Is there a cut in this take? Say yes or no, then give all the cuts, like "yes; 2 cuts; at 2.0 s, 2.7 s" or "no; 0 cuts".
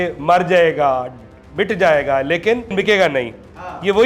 yes; 1 cut; at 2.7 s